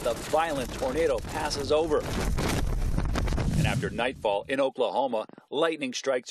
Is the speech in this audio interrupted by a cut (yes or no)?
yes